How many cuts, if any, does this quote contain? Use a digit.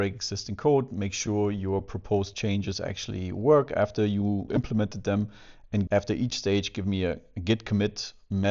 2